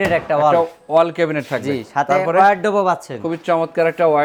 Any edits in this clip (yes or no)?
no